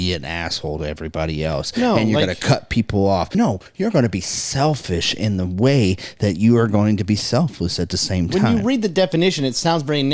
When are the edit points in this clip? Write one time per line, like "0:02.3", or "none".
0:03.3